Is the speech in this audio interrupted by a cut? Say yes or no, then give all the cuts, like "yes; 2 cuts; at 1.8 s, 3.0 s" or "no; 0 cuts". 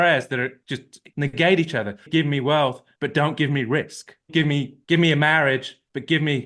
no; 0 cuts